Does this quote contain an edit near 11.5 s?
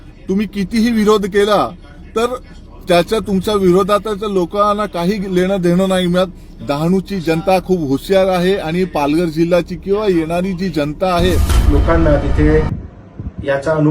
yes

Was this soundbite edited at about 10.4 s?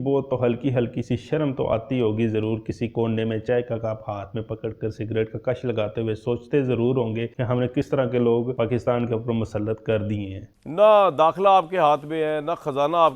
yes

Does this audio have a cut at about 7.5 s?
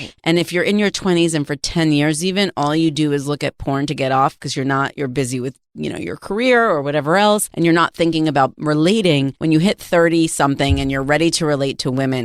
yes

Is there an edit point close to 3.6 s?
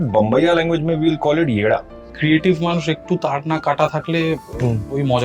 yes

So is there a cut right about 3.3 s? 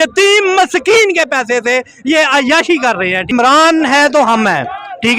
yes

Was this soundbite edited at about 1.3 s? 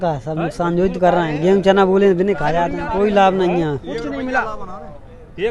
no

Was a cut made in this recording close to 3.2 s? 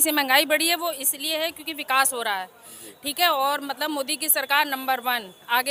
no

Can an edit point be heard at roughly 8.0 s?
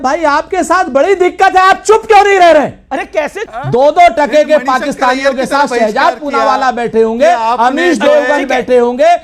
no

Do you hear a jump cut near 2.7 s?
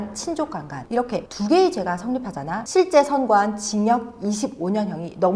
yes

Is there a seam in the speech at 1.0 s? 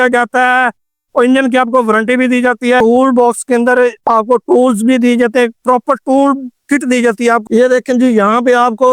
no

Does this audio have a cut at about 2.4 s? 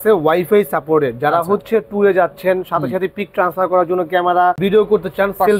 no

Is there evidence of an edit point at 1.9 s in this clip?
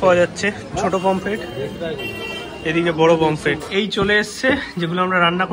no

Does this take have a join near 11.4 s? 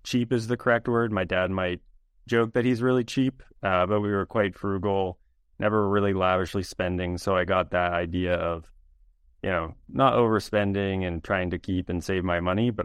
no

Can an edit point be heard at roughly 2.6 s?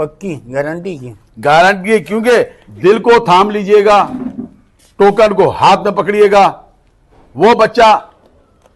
yes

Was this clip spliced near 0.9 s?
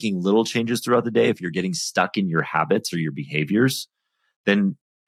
no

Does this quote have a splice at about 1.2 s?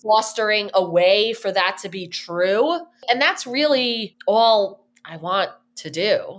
no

